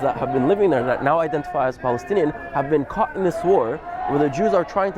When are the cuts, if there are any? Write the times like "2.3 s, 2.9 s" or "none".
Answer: none